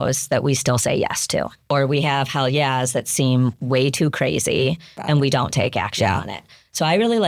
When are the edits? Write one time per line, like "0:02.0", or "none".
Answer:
0:01.6
0:05.0